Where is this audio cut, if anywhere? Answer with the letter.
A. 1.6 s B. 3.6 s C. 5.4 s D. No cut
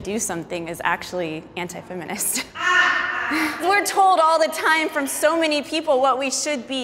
B